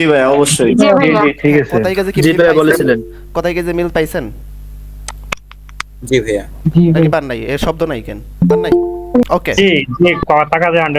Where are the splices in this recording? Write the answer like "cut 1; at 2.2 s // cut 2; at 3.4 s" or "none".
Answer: cut 1; at 9.2 s